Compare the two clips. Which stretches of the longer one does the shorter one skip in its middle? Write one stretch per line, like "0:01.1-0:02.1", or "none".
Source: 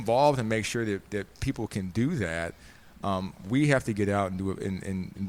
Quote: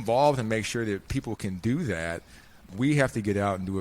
0:01.0-0:01.4
0:02.9-0:03.3